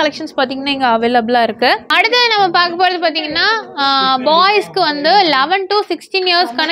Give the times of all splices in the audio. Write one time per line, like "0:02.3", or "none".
none